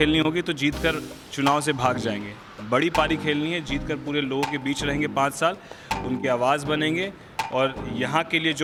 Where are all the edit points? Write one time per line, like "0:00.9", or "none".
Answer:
none